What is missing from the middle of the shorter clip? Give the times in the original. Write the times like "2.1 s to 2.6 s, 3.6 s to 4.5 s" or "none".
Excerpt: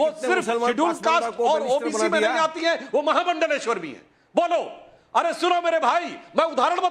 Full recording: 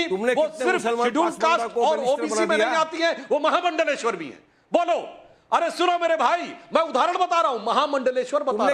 none